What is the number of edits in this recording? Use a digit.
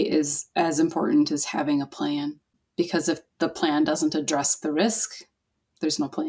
1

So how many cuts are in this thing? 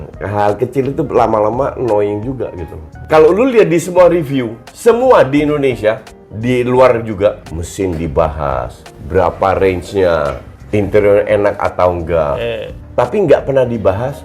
1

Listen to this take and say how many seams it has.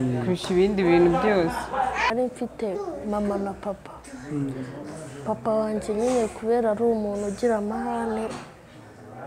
1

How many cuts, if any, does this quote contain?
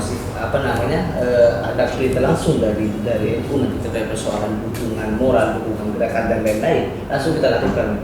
0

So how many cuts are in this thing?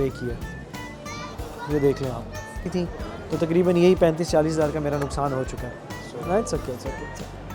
1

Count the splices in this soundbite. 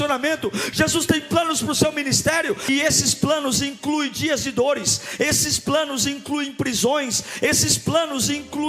1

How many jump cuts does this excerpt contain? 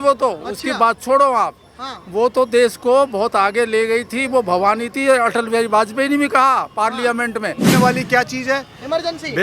1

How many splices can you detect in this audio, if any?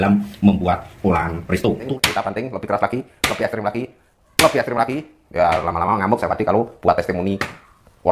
1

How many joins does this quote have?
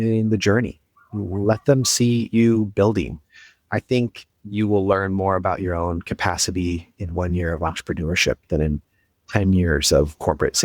1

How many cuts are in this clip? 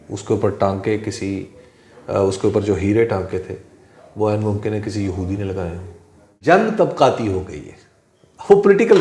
1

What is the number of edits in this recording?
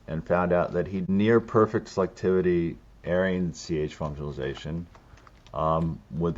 1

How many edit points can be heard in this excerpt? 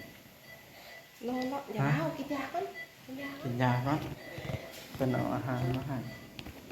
0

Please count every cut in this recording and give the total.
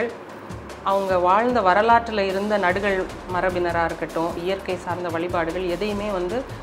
1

